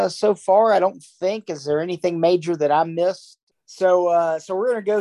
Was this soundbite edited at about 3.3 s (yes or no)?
yes